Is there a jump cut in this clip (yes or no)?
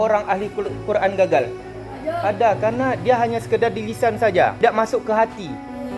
yes